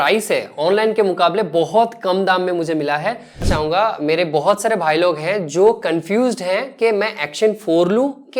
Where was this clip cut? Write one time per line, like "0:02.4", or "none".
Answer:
0:03.4